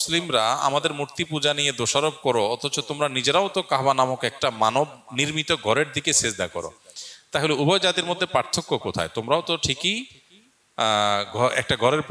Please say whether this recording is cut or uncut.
uncut